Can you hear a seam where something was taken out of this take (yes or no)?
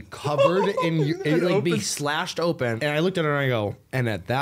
yes